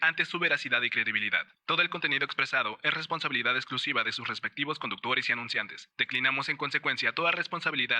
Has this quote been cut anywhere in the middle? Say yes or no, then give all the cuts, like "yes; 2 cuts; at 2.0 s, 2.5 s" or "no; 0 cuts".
no; 0 cuts